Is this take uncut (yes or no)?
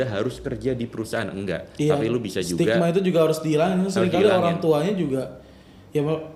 yes